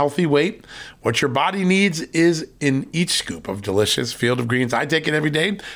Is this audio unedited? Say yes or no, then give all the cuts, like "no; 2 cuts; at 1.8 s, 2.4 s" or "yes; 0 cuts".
yes; 0 cuts